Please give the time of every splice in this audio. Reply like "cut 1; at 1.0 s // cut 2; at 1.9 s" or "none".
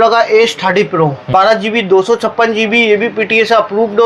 cut 1; at 1.2 s